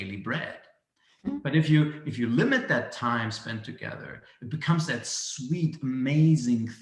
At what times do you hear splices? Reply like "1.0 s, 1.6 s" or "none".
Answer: none

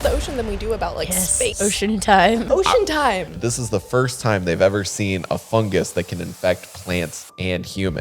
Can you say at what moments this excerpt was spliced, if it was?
1.5 s, 2.4 s, 3.3 s

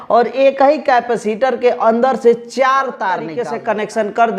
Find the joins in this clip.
3.4 s

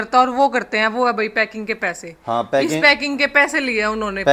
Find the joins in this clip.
none

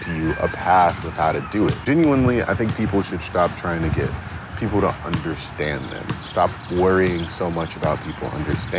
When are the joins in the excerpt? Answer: 1.8 s

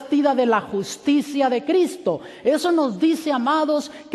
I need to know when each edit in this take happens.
none

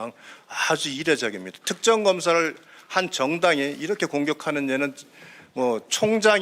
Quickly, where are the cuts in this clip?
none

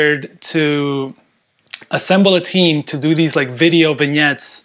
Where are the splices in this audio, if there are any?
none

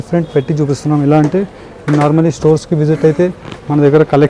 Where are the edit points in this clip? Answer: none

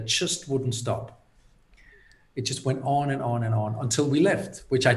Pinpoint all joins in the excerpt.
none

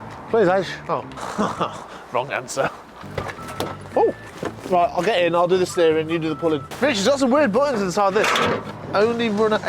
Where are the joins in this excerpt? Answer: 1.1 s, 3.0 s, 4.3 s, 6.7 s, 8.7 s

